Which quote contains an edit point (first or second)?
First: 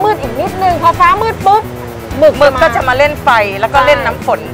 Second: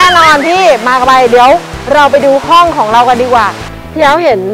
second